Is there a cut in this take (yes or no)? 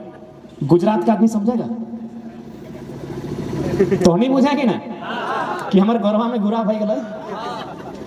no